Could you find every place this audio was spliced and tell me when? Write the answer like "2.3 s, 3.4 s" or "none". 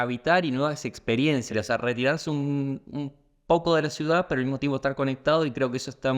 1.5 s